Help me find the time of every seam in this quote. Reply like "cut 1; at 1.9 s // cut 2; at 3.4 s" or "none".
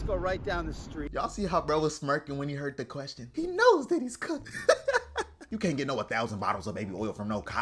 cut 1; at 1.1 s // cut 2; at 4.5 s // cut 3; at 5.4 s